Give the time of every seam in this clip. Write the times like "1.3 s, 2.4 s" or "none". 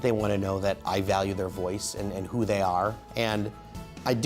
3.0 s